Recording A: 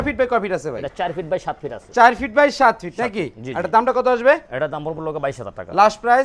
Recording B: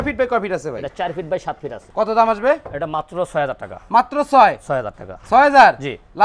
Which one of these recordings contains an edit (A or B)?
B